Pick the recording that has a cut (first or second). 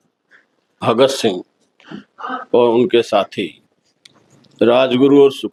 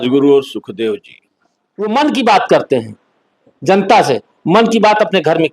second